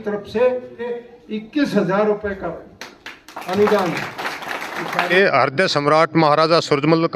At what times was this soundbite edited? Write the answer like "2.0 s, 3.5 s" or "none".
0.9 s, 5.1 s

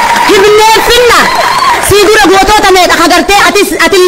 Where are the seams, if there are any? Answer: none

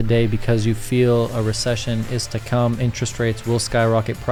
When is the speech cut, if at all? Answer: none

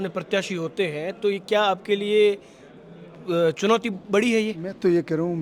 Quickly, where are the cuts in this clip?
none

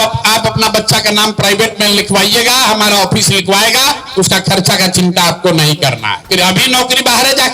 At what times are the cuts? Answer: 6.3 s

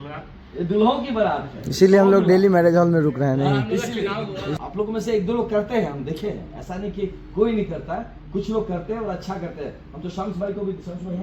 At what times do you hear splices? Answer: 4.6 s

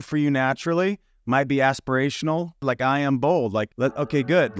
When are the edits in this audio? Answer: 2.6 s, 3.7 s

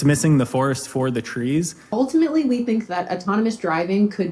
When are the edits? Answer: 1.9 s

